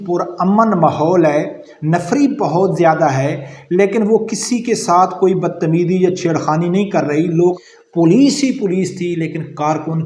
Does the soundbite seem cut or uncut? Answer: cut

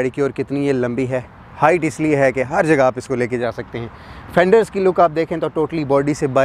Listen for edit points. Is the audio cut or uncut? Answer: uncut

